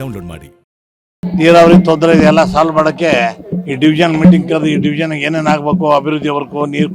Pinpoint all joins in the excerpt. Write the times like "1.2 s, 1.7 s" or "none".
1.2 s